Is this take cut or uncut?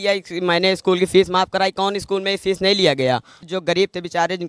cut